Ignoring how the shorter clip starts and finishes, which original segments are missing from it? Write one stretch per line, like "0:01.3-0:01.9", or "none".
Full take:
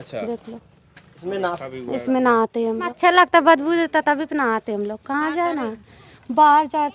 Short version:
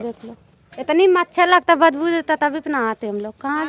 0:01.3-0:02.7